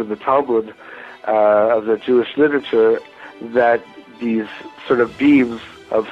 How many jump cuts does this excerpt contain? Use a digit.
0